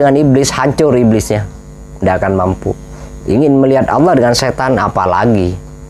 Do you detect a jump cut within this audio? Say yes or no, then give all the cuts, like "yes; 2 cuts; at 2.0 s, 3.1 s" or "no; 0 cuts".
no; 0 cuts